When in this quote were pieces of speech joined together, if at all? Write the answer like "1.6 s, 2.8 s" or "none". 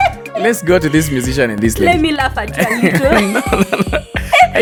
none